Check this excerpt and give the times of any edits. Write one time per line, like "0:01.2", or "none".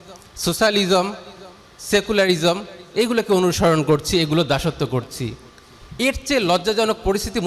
none